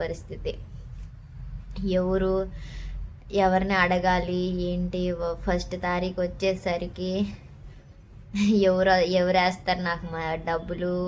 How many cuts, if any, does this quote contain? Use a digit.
0